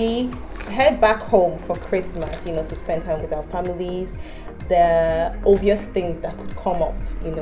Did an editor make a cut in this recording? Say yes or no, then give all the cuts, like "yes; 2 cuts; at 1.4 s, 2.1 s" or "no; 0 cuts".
no; 0 cuts